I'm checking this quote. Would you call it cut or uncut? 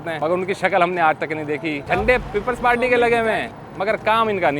cut